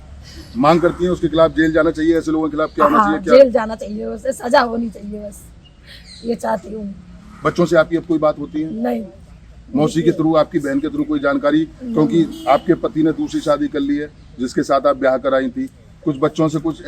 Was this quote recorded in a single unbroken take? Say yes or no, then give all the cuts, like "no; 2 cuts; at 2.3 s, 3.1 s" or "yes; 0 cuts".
yes; 0 cuts